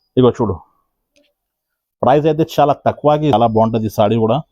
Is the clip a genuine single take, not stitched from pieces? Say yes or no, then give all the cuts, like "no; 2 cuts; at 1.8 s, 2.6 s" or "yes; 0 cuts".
no; 1 cut; at 3.3 s